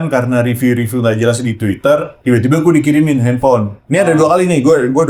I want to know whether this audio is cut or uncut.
uncut